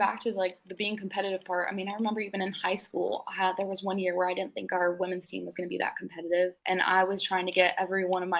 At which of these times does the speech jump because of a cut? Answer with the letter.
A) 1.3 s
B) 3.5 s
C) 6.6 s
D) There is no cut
C